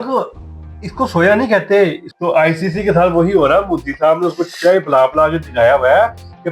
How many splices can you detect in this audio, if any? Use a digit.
1